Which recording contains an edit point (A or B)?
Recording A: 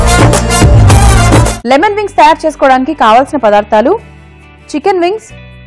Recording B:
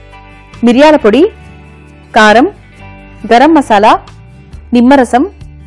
A